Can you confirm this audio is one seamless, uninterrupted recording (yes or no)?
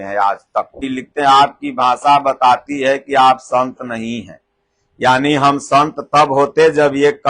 no